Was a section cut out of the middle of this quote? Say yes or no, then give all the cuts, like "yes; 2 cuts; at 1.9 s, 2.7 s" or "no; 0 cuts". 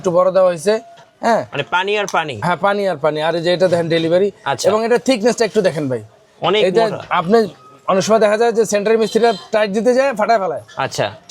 no; 0 cuts